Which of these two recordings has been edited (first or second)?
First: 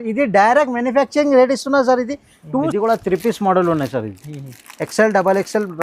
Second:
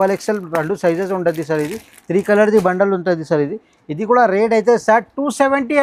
first